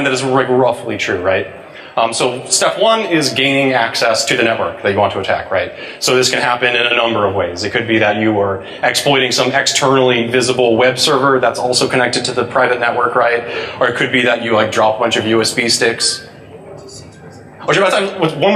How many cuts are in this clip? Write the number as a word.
one